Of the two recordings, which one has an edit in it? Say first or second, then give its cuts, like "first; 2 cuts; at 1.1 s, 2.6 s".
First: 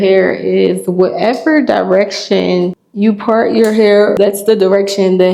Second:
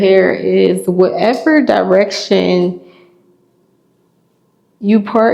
first; 2 cuts; at 2.8 s, 4.1 s